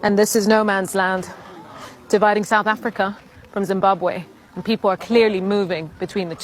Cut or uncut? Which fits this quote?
uncut